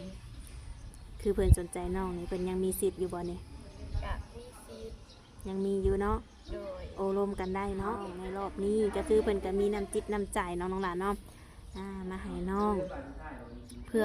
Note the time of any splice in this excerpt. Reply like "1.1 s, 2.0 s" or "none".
8.2 s